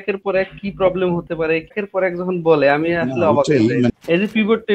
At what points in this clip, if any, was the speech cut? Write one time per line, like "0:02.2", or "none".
0:01.7
0:03.9